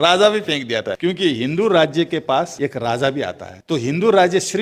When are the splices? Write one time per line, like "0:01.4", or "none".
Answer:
0:00.9
0:02.5
0:03.5